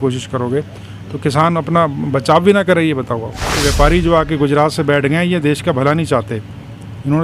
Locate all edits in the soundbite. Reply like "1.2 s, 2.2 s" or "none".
3.7 s